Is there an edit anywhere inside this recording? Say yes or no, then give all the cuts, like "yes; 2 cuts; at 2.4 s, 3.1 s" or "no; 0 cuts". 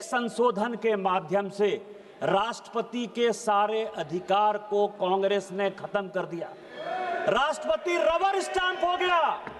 no; 0 cuts